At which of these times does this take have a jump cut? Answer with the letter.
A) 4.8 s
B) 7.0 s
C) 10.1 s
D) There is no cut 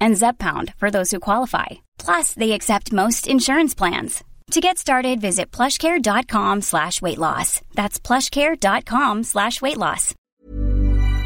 C